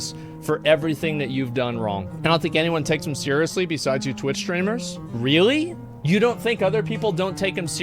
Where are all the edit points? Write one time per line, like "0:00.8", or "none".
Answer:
0:02.1
0:05.0
0:05.9

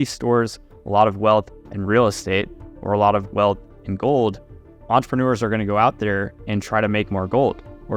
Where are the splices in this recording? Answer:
0:04.8

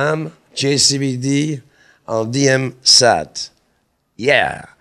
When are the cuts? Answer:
none

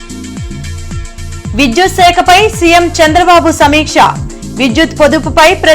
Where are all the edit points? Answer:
0:01.1

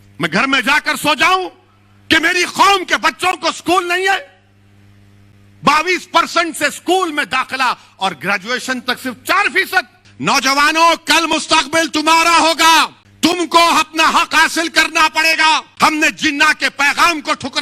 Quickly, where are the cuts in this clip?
0:10.0
0:13.0
0:15.7

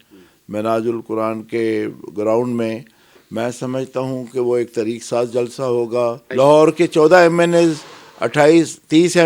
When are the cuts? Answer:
0:06.2

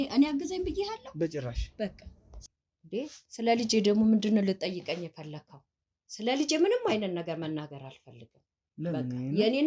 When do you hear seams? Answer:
0:02.4

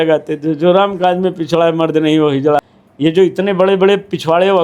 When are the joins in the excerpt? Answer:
0:02.6

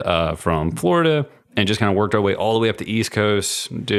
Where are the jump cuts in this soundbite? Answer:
none

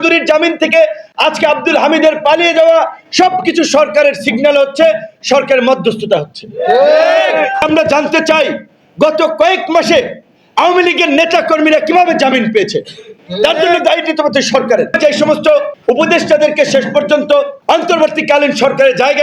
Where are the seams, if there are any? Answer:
0:07.6
0:14.9
0:15.7
0:17.5

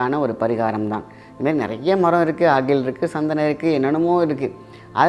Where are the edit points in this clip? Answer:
none

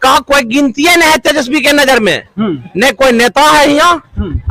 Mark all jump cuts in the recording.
none

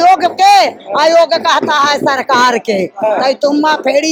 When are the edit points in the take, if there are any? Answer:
none

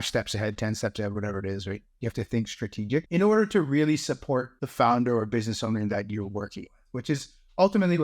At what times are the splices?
0:03.1
0:04.6

